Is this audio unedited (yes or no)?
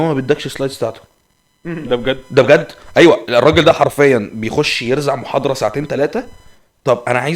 yes